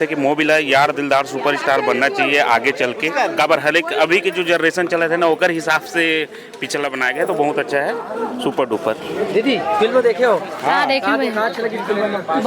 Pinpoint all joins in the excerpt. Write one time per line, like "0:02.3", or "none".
none